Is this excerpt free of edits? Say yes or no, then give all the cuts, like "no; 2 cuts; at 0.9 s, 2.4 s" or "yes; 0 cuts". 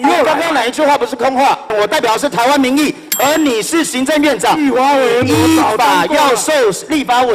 no; 1 cut; at 1.7 s